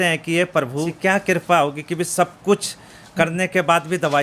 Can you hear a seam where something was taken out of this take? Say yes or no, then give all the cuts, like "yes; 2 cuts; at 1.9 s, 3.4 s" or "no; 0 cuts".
yes; 1 cut; at 0.9 s